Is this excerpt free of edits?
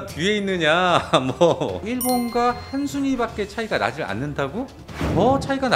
no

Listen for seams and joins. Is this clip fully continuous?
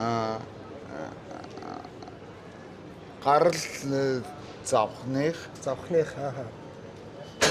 yes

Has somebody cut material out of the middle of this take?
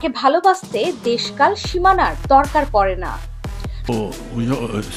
yes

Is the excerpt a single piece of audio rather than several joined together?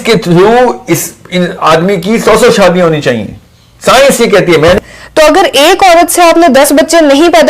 no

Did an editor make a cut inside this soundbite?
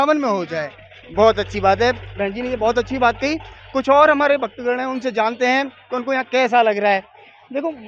no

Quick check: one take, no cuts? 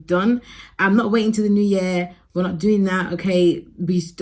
yes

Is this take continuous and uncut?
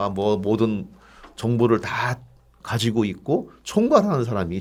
yes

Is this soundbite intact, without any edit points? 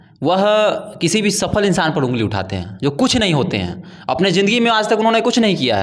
yes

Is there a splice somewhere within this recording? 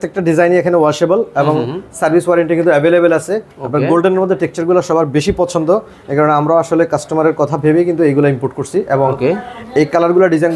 no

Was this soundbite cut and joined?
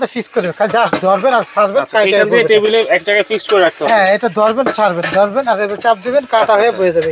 no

